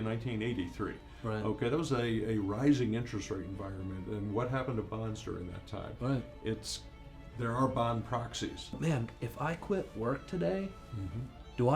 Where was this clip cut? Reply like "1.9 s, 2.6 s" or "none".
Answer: 8.7 s